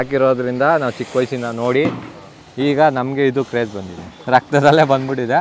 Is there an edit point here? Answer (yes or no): no